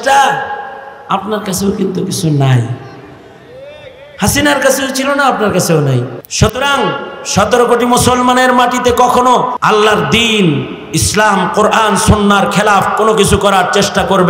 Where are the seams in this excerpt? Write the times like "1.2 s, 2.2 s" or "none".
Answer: 6.2 s, 9.6 s

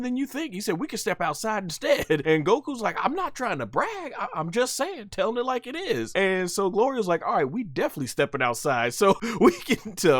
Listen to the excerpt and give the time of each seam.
2.2 s, 6.1 s, 9.2 s

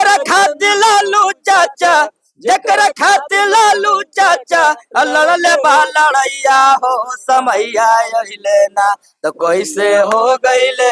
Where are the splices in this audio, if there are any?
none

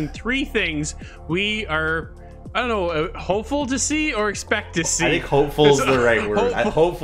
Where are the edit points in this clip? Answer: none

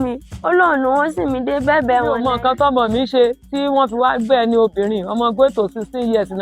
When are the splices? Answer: 2.1 s

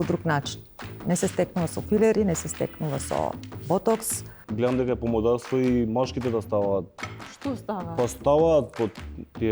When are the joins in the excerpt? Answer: 4.4 s

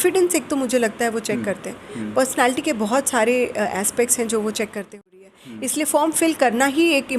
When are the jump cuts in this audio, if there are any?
5.1 s

